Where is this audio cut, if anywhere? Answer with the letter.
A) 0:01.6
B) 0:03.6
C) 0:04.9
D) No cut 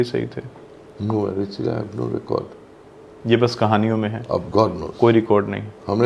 D